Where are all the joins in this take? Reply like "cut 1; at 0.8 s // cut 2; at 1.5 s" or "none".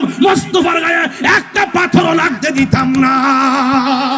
none